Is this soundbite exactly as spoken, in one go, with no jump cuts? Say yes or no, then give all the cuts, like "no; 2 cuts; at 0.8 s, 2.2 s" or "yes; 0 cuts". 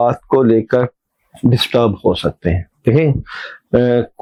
yes; 0 cuts